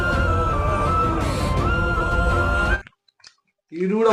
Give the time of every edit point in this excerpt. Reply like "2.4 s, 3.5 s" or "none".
2.8 s